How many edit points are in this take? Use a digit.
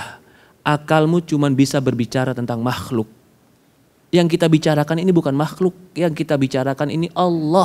0